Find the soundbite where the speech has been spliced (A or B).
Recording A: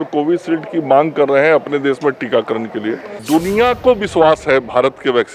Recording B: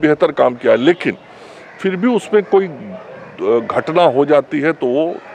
A